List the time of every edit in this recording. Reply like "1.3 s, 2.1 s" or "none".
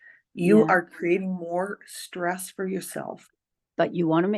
3.3 s